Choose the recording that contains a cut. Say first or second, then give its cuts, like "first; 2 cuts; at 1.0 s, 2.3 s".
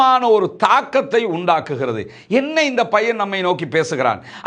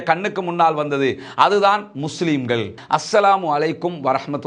second; 1 cut; at 2.8 s